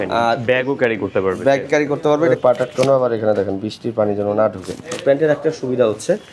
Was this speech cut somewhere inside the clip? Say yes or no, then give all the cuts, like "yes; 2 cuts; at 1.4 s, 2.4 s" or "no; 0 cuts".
yes; 2 cuts; at 2.3 s, 5.0 s